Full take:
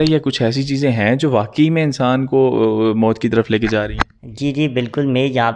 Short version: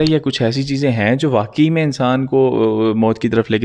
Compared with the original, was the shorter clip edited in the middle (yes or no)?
no